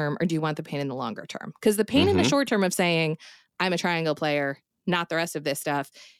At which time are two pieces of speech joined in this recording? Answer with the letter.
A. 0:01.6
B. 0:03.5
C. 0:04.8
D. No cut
D